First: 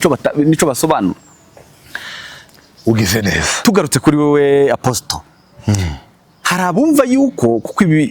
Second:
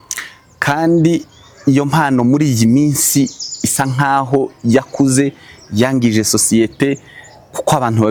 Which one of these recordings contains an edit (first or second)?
first